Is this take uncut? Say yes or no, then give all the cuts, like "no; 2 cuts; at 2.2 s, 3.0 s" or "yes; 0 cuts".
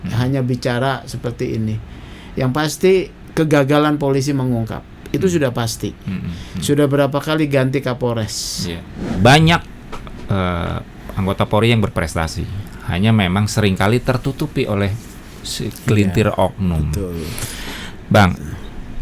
no; 1 cut; at 9.1 s